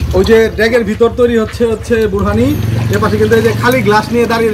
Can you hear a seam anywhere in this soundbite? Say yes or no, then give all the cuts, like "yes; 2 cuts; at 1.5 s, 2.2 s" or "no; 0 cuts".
no; 0 cuts